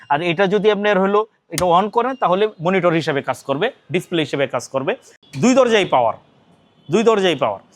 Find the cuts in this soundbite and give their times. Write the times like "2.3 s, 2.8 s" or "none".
5.1 s